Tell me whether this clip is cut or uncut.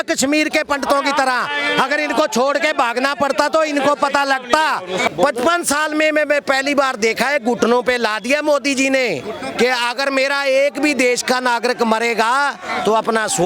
cut